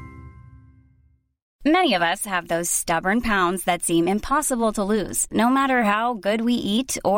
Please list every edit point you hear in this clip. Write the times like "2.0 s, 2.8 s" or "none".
1.4 s